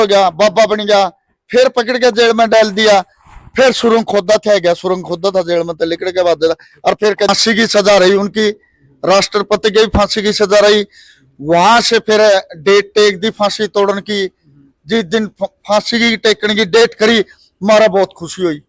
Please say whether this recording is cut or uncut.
cut